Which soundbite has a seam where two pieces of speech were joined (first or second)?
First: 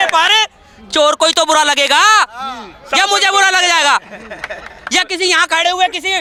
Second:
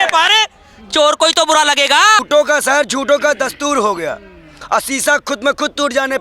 second